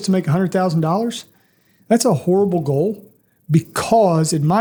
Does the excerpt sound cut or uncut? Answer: uncut